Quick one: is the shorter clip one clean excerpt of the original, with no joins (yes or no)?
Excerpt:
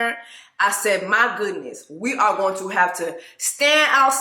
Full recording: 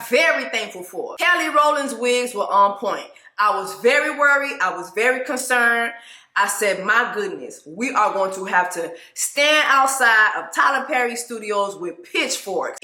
yes